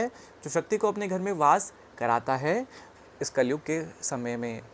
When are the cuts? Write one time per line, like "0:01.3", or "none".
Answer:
0:02.8

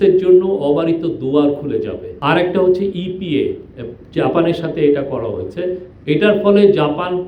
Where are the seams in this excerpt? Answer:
0:02.0

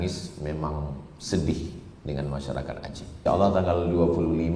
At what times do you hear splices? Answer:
0:03.2

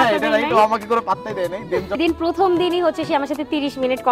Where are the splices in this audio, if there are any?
0:01.9

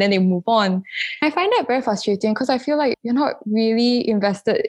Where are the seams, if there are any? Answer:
0:01.2
0:02.9

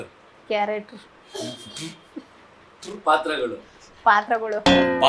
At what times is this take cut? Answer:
none

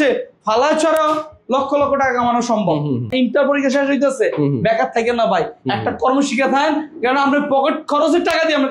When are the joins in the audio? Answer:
0:03.1

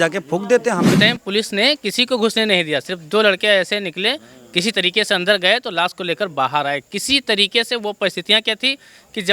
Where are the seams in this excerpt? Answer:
0:00.9

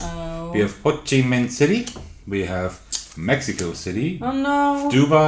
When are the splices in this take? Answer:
none

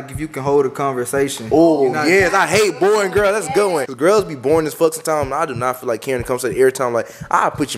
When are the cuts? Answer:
0:03.9

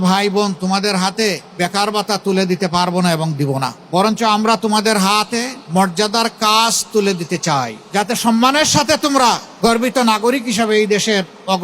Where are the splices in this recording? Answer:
0:01.5
0:03.8
0:05.6
0:07.8
0:09.5

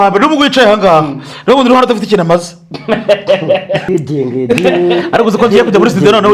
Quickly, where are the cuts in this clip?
0:03.9

